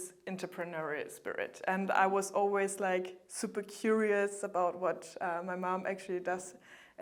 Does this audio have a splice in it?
no; 0 cuts

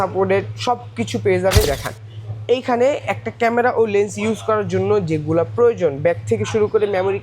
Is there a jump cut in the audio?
yes; 1 cut; at 1.7 s

